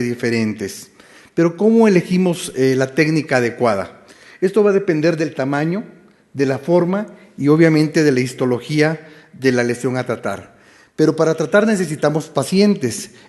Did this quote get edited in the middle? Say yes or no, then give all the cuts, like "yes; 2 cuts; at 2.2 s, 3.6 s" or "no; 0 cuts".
no; 0 cuts